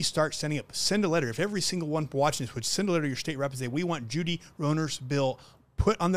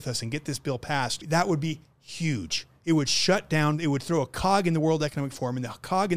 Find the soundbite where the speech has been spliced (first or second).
second